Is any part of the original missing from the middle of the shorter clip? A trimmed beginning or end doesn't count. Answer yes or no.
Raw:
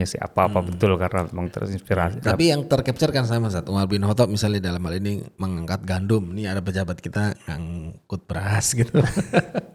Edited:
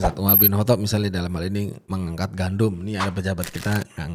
no